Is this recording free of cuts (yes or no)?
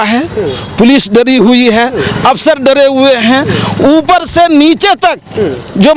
yes